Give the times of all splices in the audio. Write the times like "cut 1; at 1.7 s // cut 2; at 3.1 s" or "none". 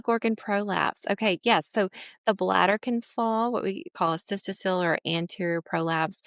none